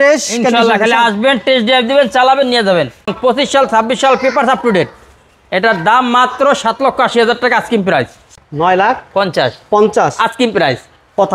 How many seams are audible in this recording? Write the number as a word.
two